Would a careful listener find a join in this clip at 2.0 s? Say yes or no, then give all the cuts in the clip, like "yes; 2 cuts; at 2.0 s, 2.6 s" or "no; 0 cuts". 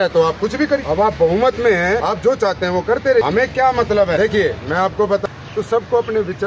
yes; 5 cuts; at 0.8 s, 2.0 s, 3.2 s, 4.2 s, 5.2 s